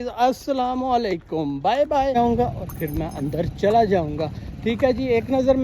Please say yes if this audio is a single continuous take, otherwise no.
no